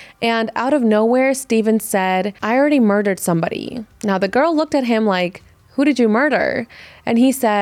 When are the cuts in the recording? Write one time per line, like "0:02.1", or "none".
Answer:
none